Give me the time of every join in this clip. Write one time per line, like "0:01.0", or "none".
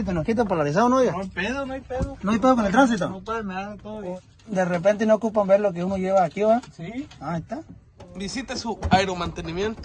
0:04.1
0:08.0